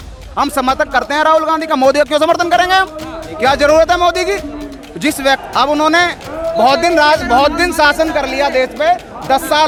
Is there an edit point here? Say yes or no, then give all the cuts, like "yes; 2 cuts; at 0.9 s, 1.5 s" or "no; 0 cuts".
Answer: no; 0 cuts